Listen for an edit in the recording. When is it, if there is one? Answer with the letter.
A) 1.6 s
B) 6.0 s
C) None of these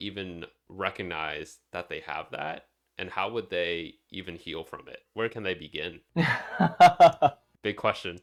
C